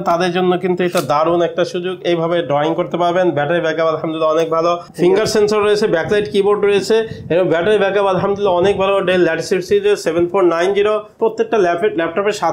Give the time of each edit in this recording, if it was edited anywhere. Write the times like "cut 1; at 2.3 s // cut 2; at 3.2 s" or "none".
cut 1; at 4.9 s // cut 2; at 11.1 s